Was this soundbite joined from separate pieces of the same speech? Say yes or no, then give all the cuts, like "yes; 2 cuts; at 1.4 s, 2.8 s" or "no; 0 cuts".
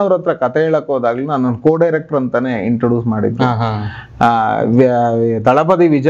no; 0 cuts